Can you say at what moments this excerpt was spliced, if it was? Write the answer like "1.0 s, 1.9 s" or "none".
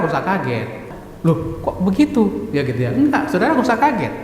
1.0 s